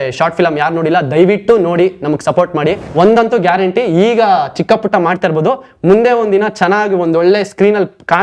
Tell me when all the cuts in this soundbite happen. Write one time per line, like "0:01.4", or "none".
0:02.8